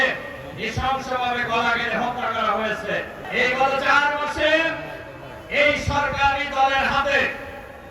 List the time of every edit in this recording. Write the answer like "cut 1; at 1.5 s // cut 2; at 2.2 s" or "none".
cut 1; at 3.3 s